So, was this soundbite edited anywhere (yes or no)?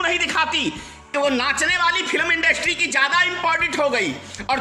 yes